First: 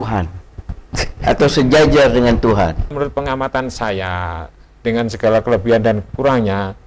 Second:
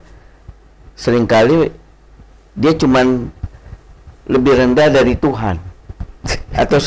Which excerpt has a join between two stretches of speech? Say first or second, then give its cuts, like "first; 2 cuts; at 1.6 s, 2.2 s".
first; 1 cut; at 2.9 s